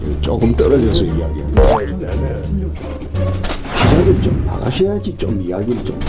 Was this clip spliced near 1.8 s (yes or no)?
yes